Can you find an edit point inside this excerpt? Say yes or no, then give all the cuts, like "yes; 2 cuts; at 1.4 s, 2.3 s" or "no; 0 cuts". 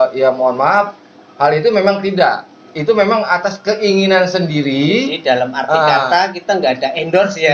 no; 0 cuts